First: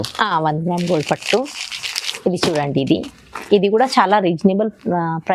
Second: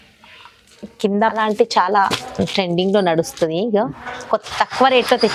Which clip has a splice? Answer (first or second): second